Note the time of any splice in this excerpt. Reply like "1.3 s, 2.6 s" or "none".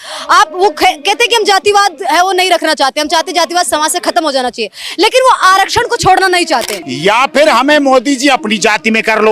6.8 s